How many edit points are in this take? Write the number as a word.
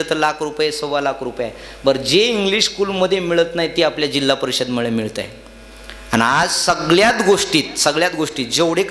zero